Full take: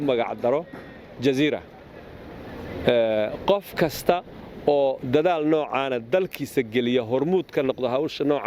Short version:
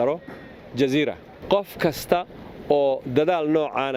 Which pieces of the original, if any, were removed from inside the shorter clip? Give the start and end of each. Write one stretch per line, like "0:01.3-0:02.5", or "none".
0:01.8-0:03.4